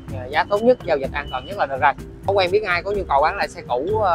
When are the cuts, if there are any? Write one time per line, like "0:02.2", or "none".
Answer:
0:02.3